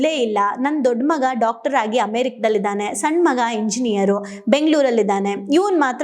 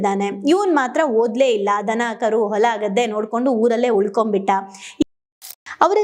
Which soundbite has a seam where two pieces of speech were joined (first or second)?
second